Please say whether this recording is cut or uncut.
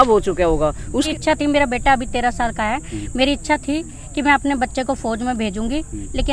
cut